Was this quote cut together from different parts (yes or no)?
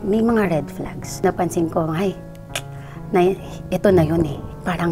yes